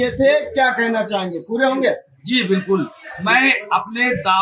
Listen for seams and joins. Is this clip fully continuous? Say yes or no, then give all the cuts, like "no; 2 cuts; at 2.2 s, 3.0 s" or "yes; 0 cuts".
yes; 0 cuts